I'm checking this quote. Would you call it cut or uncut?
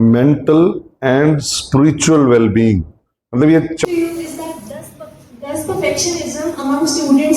cut